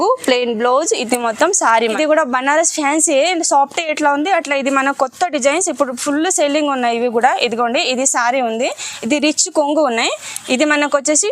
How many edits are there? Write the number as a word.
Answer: one